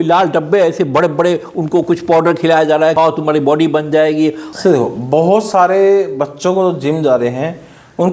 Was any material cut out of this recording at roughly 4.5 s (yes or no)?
yes